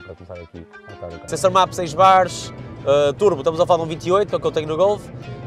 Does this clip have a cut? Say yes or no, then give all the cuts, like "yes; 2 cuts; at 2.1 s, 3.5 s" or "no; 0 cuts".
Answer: yes; 1 cut; at 1.2 s